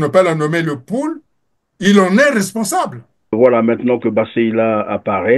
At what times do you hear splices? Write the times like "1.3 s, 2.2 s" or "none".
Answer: 3.3 s